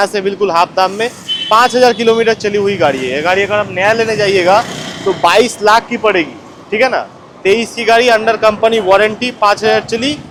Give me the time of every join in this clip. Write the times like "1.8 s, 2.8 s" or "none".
none